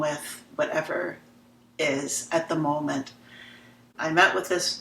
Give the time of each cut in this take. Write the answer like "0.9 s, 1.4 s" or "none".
3.8 s